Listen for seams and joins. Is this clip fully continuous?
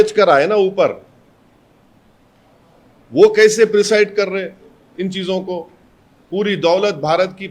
yes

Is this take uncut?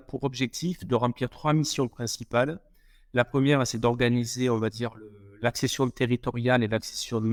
yes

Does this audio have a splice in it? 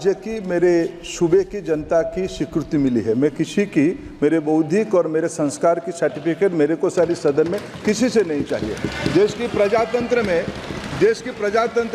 no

